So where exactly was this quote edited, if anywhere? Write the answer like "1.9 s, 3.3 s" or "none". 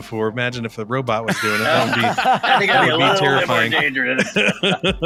none